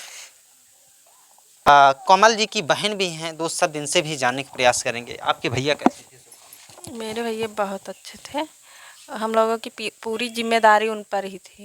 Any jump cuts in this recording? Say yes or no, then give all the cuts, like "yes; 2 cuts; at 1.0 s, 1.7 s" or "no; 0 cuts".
no; 0 cuts